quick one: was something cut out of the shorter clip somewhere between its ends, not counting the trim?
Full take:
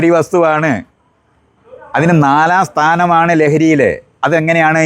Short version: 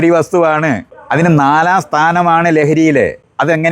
yes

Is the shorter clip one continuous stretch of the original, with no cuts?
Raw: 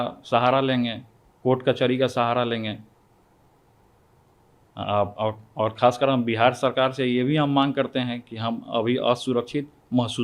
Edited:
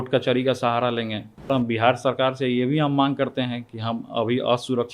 no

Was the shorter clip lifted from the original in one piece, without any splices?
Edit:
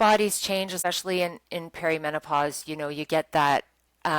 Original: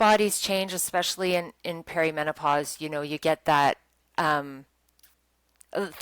no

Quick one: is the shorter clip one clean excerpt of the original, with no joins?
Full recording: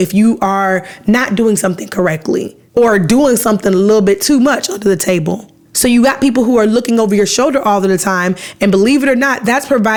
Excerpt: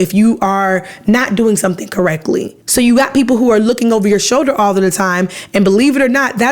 no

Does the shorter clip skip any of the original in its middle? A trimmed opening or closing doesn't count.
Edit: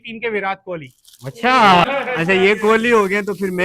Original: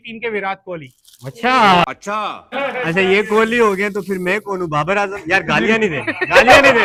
yes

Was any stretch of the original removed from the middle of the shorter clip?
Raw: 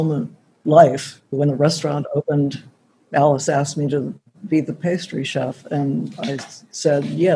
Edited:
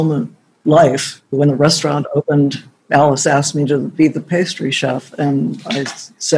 yes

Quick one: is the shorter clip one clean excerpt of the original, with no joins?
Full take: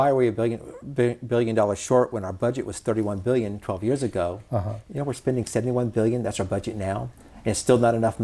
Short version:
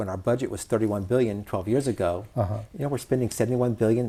yes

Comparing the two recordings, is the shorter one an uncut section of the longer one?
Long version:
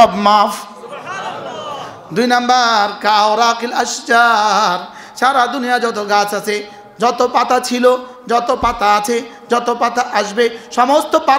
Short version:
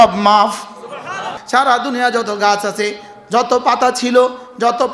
no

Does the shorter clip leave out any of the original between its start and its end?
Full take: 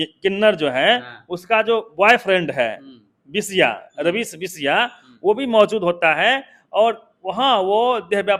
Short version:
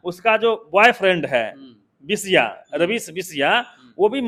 no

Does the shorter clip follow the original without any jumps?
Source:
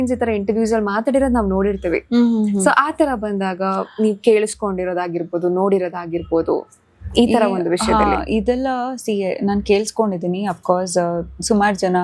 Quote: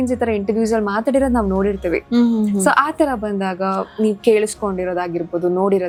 yes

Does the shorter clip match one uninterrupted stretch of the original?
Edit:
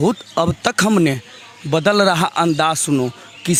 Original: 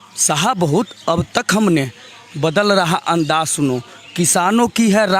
yes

